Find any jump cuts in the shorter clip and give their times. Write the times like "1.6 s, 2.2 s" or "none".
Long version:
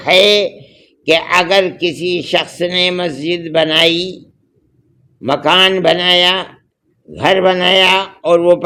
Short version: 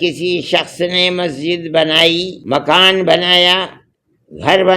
2.4 s